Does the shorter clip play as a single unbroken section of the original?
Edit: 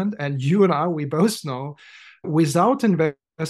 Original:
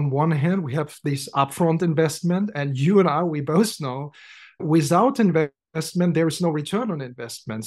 yes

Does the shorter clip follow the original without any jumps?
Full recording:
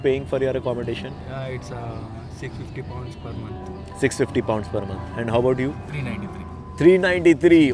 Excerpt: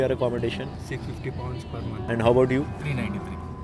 no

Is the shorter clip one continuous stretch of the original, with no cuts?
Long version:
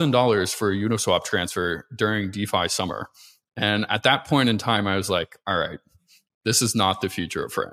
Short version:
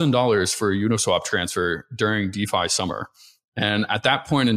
yes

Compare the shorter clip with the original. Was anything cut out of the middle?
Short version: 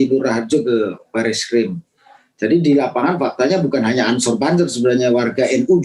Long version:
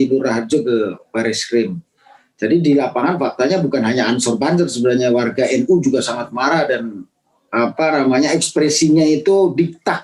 no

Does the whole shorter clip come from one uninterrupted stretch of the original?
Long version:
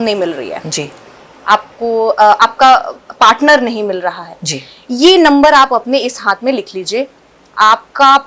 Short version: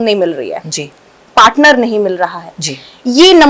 no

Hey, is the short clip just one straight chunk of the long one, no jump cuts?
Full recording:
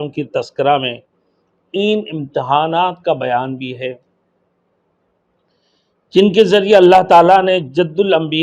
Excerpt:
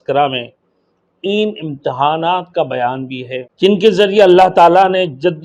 no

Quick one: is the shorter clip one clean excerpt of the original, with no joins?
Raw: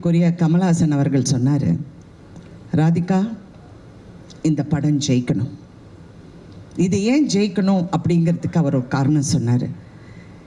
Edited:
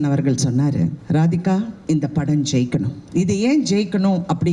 no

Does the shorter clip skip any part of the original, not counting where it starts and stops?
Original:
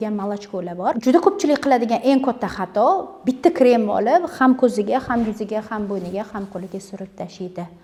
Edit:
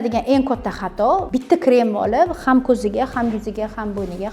yes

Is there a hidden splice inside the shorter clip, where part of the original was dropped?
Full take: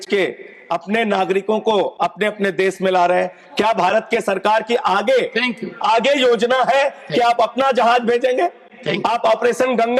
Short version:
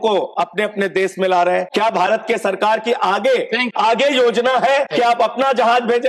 yes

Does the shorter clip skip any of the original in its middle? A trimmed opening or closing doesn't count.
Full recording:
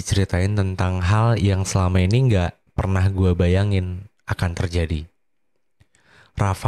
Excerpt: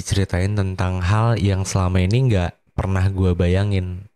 no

